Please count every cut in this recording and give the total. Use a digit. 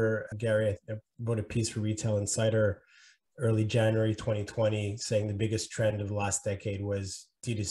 0